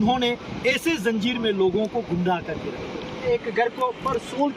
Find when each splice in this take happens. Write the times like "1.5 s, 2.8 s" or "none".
3.2 s

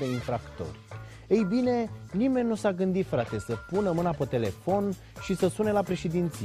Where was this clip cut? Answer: none

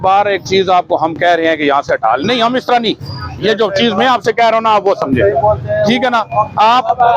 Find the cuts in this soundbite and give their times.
none

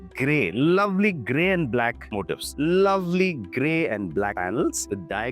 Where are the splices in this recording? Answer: 2.5 s

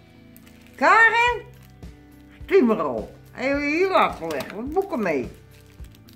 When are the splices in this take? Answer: none

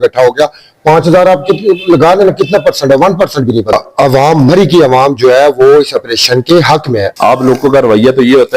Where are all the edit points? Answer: 3.7 s, 7.1 s

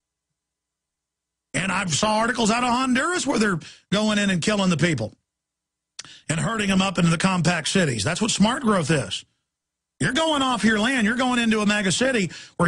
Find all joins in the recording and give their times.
4.3 s

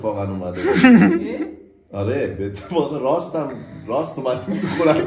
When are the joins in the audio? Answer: none

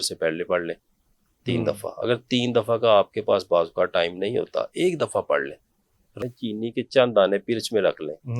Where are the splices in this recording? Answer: 6.3 s

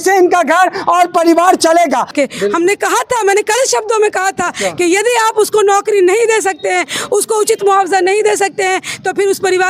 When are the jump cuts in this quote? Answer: 2.1 s

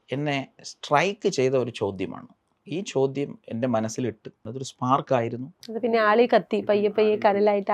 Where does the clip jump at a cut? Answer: 4.5 s, 5.6 s

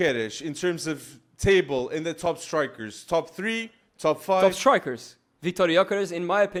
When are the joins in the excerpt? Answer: none

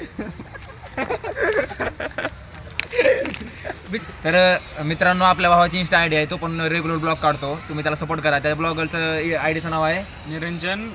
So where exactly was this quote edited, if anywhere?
none

